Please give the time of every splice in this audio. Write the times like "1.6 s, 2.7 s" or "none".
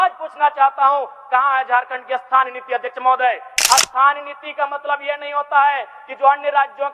3.5 s